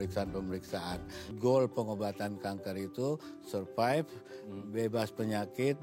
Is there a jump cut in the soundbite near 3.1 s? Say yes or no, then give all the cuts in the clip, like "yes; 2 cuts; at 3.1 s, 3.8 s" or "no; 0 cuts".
no; 1 cut; at 1.3 s